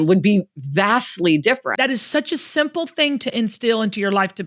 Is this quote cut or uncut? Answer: cut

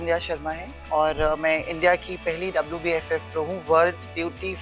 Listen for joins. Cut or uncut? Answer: uncut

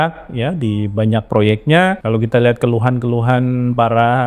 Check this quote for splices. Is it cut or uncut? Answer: cut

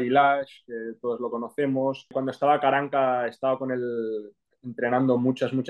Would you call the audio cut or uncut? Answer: cut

